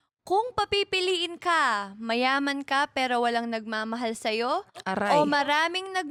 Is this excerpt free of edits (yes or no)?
yes